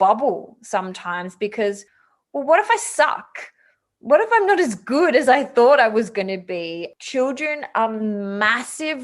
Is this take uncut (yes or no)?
no